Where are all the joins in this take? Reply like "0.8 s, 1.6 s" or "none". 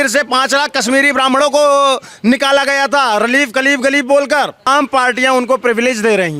4.7 s